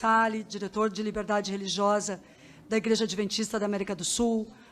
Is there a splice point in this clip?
no; 0 cuts

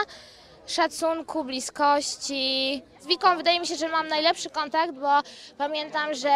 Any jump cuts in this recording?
yes; 1 cut; at 3.0 s

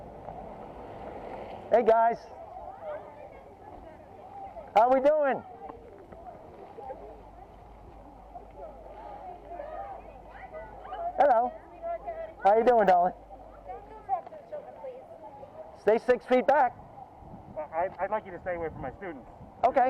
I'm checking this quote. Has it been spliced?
yes; 2 cuts; at 1.6 s, 15.7 s

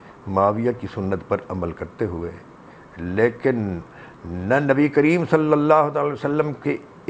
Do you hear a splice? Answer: no; 0 cuts

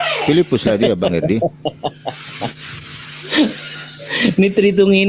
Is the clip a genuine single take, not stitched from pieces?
yes; 0 cuts

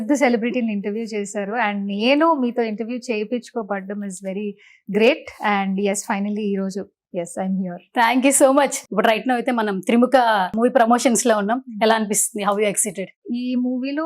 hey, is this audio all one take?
no; 3 cuts; at 8.8 s, 10.5 s, 13.2 s

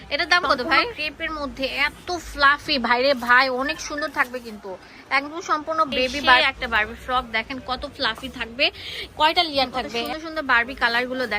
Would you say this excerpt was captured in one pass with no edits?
no; 3 cuts; at 1.0 s, 6.4 s, 10.1 s

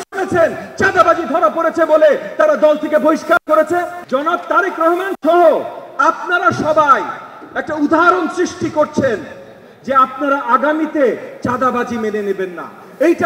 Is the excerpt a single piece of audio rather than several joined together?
no; 1 cut; at 4.0 s

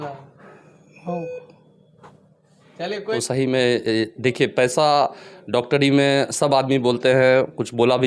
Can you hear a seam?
yes; 1 cut; at 3.0 s

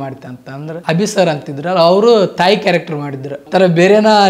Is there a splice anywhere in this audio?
yes; 2 cuts; at 0.8 s, 3.4 s

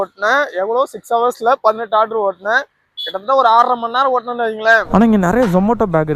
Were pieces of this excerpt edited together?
yes; 1 cut; at 4.8 s

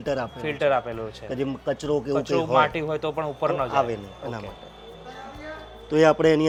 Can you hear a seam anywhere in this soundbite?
no; 0 cuts

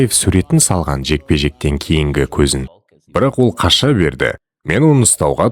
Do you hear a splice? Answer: yes; 1 cut; at 2.7 s

